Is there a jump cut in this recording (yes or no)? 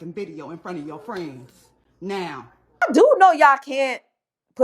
yes